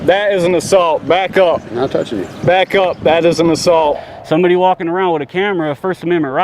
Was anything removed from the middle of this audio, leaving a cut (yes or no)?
yes